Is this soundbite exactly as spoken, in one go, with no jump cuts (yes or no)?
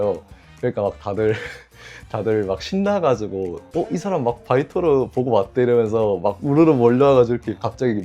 yes